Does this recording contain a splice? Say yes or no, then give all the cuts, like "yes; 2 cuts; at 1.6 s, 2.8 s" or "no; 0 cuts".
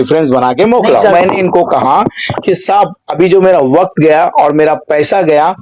yes; 1 cut; at 1.1 s